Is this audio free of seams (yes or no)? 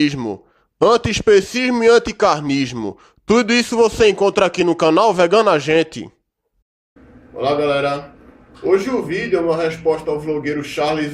no